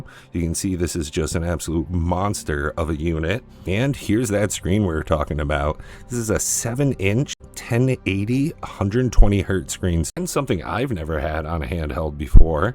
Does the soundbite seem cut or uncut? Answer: cut